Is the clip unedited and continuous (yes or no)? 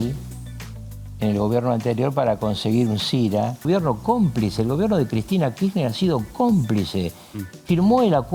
no